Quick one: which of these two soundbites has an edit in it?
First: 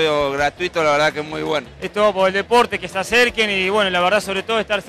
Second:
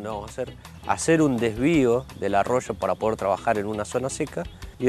first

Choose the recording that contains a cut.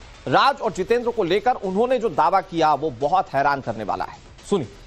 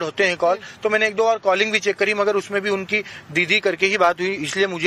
first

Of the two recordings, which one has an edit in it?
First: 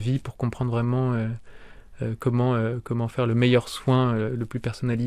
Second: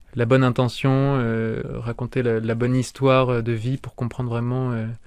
second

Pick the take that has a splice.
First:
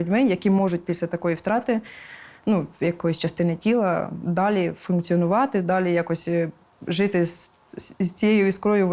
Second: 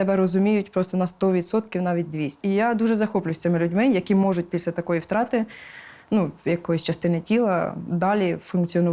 second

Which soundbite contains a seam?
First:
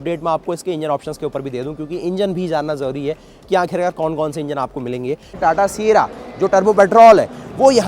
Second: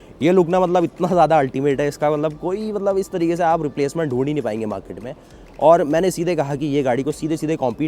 first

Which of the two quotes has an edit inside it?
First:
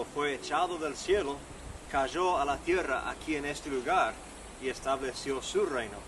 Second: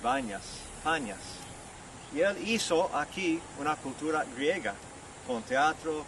second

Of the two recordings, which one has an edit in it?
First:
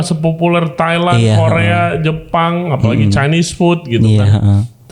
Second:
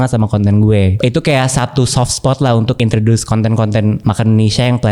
second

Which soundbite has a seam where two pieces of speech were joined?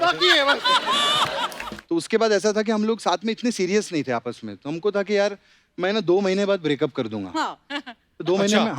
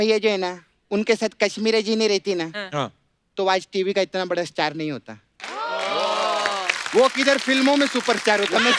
first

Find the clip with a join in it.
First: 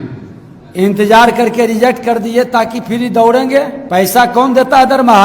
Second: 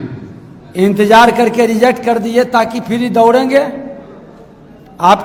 first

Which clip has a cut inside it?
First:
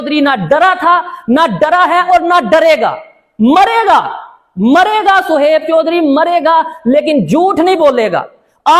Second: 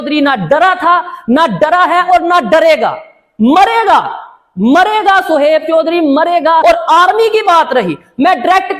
second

